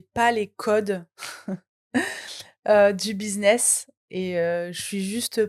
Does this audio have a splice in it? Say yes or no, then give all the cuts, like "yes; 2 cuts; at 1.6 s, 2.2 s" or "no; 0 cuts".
no; 0 cuts